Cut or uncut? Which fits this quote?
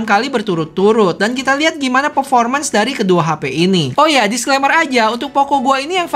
uncut